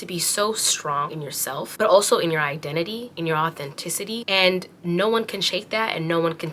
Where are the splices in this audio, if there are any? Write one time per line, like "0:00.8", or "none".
0:03.1